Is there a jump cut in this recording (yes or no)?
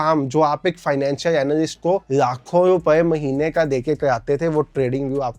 no